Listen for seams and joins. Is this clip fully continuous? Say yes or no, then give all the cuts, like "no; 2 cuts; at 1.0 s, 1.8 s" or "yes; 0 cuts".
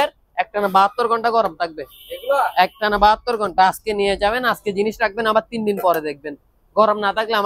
yes; 0 cuts